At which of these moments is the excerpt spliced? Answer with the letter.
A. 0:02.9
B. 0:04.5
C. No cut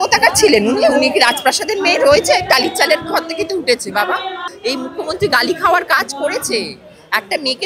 B